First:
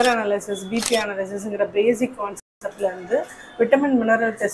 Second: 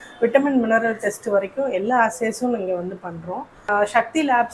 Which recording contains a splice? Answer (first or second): second